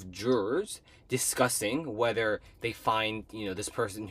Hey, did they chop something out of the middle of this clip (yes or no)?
no